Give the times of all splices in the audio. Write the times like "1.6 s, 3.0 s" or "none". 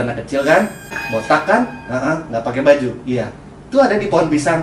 1.0 s